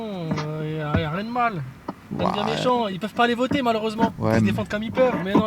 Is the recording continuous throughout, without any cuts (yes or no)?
no